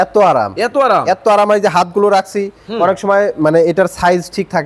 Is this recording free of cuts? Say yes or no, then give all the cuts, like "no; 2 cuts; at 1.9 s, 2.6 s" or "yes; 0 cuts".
yes; 0 cuts